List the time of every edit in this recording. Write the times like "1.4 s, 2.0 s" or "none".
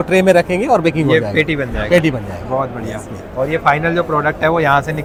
none